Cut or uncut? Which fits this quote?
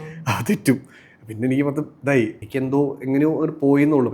cut